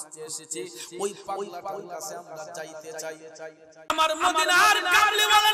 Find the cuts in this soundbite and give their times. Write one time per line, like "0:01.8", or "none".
0:03.9